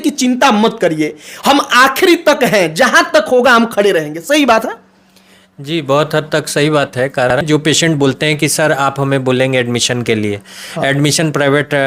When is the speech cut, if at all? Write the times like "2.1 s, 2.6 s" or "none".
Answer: 7.4 s